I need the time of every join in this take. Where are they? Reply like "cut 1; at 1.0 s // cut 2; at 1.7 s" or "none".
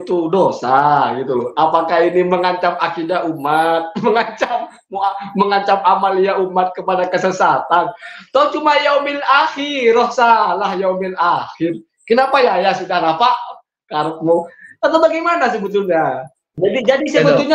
cut 1; at 16.5 s